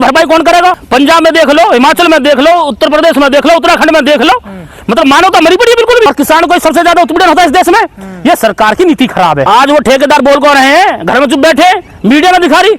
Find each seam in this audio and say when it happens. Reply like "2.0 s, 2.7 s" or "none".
0.8 s, 6.1 s, 9.4 s